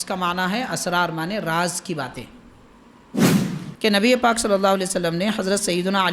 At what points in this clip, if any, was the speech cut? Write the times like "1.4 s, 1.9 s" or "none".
3.3 s